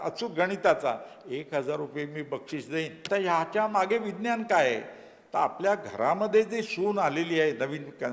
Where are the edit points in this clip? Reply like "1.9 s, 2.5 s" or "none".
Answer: 3.0 s